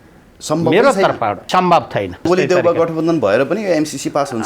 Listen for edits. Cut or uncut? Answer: cut